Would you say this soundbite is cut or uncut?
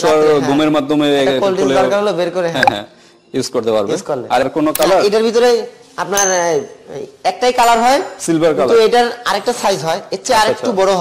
cut